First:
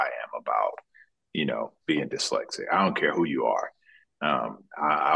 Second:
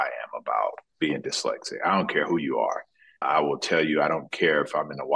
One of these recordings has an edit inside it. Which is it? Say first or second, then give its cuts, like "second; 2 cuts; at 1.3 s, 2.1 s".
second; 2 cuts; at 0.9 s, 3.2 s